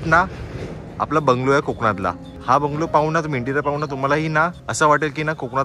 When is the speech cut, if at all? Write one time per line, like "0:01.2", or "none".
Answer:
0:02.3
0:04.6

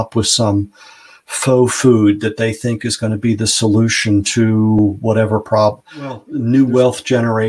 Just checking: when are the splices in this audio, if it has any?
0:06.3

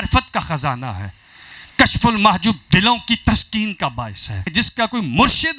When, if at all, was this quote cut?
0:04.4

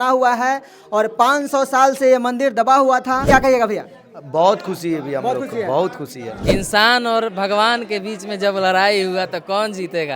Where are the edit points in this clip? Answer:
0:03.2
0:06.3

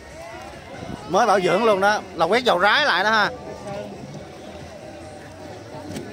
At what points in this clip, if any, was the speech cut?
0:01.0

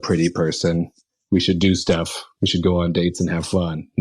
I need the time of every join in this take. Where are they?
0:01.1

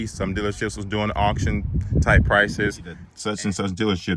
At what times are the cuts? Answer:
0:03.1

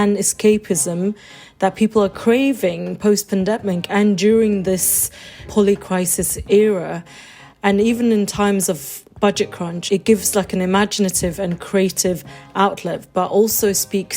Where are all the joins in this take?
0:05.5
0:09.8

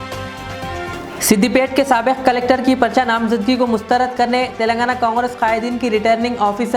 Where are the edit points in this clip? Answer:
0:00.9

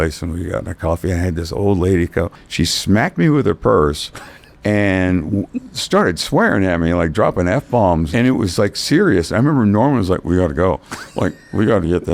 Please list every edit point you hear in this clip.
0:02.4
0:08.1

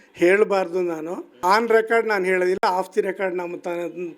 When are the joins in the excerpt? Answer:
0:01.3

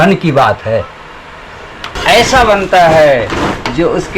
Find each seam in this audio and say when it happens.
0:01.9

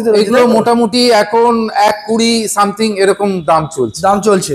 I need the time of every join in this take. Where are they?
none

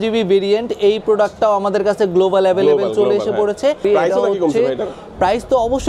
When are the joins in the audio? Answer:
0:03.8

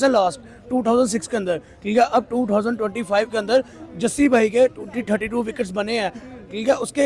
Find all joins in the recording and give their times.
none

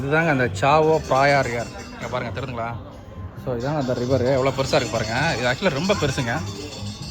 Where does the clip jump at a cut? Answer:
none

